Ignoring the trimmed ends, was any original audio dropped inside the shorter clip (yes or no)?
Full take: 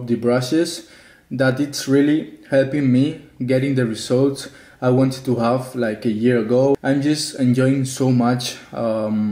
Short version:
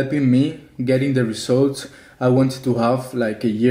no